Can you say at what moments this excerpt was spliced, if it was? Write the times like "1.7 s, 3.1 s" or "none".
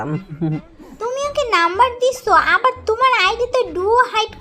0.9 s